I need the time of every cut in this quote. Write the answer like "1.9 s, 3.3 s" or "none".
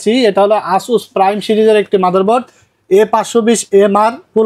none